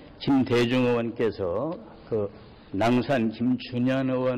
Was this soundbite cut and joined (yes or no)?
yes